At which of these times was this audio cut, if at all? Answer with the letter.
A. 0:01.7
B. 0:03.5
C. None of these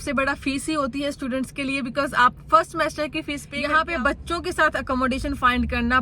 B